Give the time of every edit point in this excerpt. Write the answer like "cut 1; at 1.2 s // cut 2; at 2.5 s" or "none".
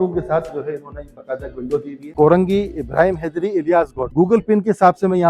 cut 1; at 2.0 s // cut 2; at 4.0 s